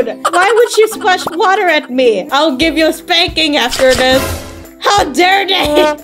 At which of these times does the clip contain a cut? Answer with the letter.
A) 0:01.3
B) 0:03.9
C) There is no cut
A